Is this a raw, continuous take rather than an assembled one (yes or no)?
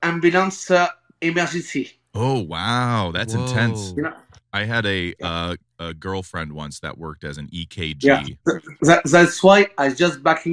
yes